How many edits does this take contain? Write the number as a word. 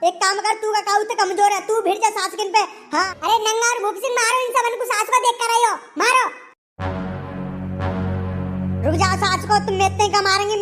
one